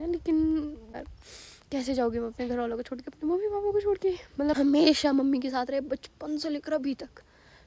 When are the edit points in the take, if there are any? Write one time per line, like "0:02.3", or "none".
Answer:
0:01.0
0:04.5